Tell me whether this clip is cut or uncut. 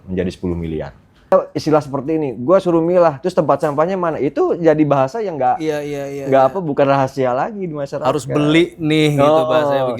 cut